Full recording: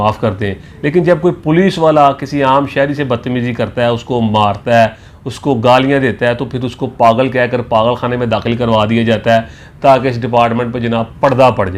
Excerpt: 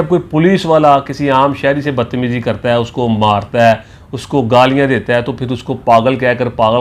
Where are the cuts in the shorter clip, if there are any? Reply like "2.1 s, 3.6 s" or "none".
none